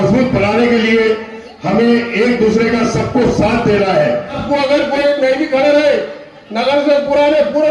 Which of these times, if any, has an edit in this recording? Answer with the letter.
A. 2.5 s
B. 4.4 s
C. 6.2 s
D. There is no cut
B